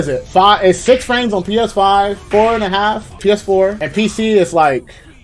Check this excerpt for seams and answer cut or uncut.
uncut